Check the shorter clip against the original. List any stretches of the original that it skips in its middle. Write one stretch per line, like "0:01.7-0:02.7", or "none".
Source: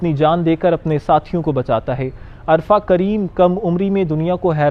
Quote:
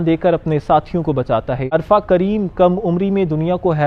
0:02.1-0:02.5